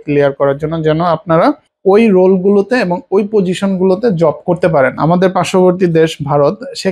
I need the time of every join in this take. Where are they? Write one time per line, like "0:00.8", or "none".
0:01.7
0:04.9